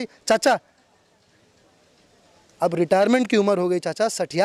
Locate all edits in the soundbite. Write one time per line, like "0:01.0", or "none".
none

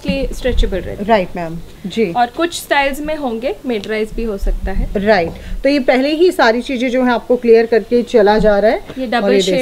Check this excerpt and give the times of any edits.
0:01.7

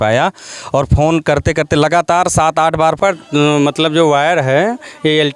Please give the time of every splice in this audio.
0:03.0

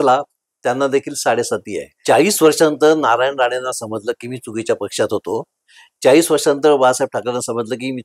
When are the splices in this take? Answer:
0:01.9

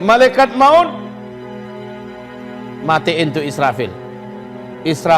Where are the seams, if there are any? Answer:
0:01.0
0:02.8

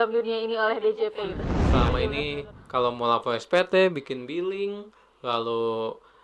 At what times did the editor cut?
0:01.6

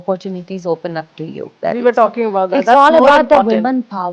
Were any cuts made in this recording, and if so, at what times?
0:01.5

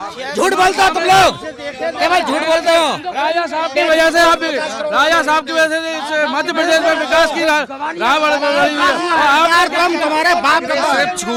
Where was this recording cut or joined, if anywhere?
none

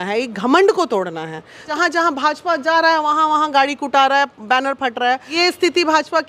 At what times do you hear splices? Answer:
0:01.7
0:05.4

